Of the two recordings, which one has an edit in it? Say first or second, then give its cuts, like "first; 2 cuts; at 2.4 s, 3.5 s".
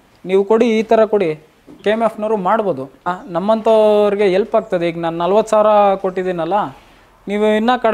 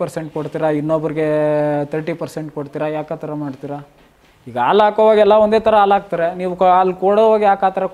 first; 2 cuts; at 1.7 s, 3.2 s